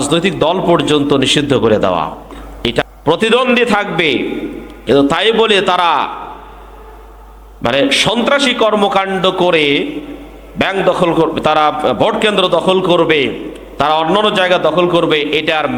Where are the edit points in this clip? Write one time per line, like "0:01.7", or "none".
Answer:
0:02.8

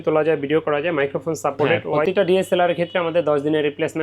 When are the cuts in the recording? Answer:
0:02.0

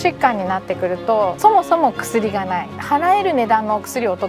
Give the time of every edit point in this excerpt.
0:01.3
0:02.7

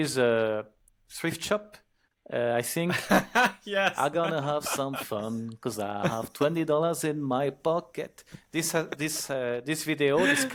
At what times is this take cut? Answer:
none

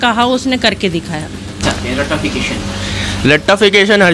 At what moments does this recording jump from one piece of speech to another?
0:01.6

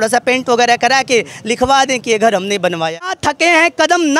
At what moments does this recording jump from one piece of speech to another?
0:03.1

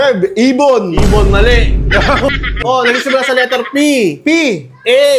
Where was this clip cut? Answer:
0:02.6

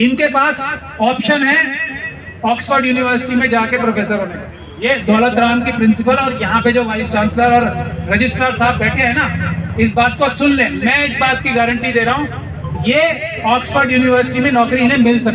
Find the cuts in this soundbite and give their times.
none

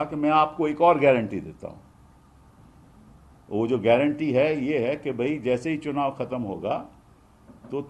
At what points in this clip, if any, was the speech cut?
none

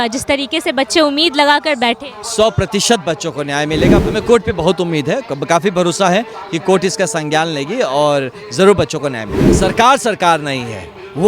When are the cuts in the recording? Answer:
0:04.0
0:09.5

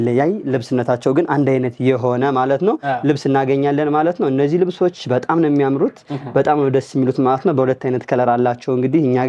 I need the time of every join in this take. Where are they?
none

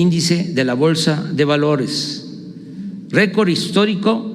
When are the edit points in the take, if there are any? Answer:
0:02.8

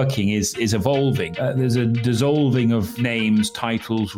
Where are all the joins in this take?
0:01.3
0:02.9

